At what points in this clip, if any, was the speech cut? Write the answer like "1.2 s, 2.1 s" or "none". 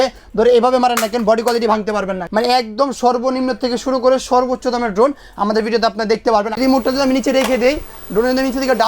2.2 s, 6.5 s